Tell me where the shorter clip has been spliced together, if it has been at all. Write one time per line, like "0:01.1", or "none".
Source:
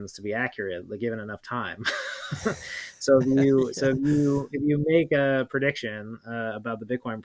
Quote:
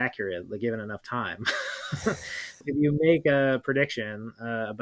0:02.6